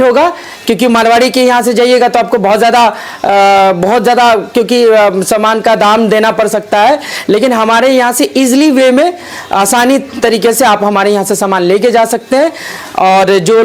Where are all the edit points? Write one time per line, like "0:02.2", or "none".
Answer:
none